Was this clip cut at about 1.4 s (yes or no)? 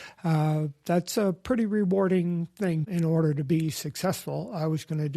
no